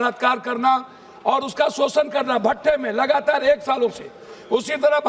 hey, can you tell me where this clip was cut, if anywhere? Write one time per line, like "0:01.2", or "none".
none